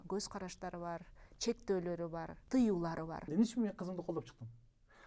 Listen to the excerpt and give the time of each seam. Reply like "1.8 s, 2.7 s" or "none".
2.4 s, 3.3 s